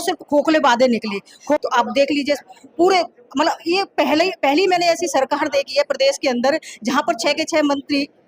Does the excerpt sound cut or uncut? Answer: cut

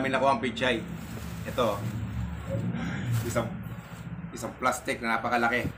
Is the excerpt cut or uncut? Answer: uncut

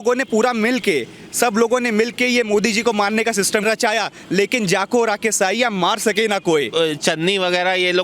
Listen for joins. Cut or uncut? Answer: cut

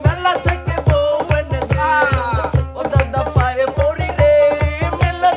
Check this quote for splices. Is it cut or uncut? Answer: uncut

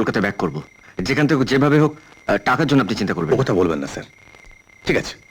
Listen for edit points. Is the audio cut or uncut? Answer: uncut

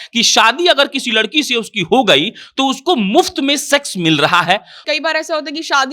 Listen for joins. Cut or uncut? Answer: cut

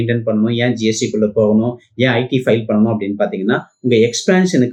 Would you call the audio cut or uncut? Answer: uncut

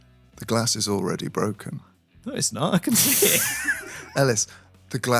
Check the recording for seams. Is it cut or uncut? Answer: uncut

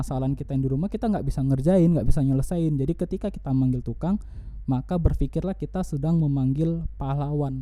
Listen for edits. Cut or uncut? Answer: uncut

